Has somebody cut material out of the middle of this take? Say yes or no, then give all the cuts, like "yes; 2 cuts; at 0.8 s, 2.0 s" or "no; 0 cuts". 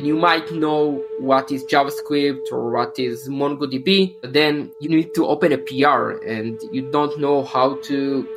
no; 0 cuts